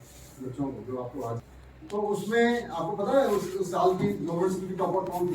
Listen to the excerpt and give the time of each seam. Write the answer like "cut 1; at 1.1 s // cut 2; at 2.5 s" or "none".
cut 1; at 1.5 s